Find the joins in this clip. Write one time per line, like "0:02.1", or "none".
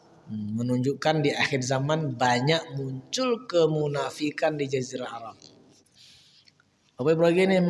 0:05.8

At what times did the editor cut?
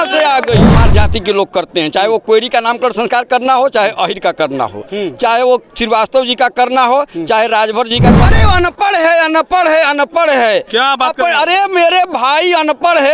0:00.8
0:08.2

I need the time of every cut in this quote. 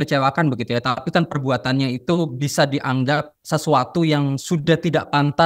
0:03.3

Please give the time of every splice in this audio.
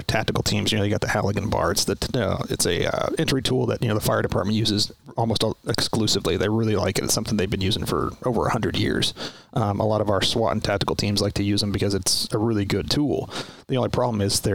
none

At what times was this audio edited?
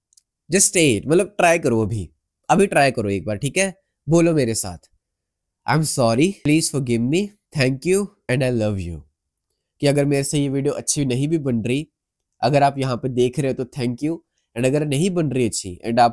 0:06.4
0:07.4
0:08.2

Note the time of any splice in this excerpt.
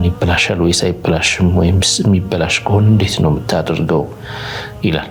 none

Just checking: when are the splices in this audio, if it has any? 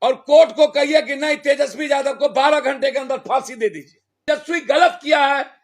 0:04.3

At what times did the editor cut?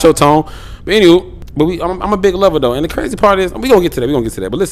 0:01.4

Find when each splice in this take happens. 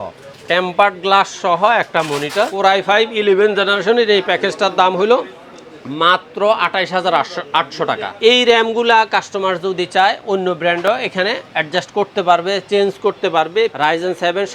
0:02.5
0:08.1
0:13.7

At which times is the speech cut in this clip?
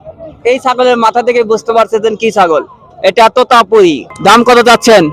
0:04.1

